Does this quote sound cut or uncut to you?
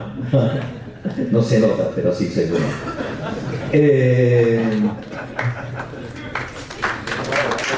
uncut